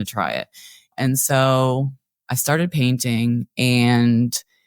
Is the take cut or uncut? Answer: cut